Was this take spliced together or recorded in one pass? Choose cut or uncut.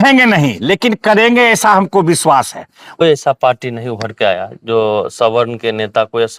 cut